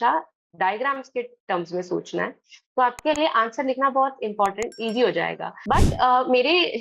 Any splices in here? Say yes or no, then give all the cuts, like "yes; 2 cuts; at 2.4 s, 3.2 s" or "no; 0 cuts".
yes; 1 cut; at 5.5 s